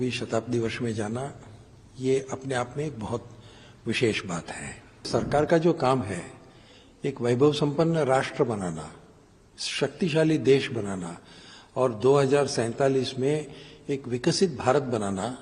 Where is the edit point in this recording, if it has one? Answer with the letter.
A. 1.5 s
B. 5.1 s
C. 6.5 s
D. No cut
B